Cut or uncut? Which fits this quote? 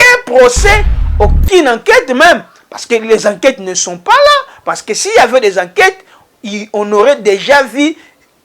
cut